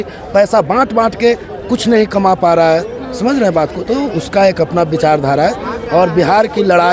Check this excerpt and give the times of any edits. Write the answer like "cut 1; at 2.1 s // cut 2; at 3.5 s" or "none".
none